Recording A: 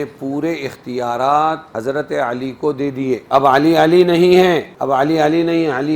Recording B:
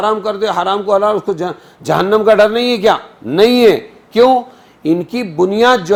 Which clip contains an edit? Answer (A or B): A